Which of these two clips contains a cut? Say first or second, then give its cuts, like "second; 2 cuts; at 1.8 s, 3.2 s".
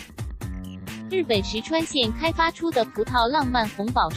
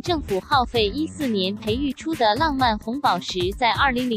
first; 1 cut; at 1.1 s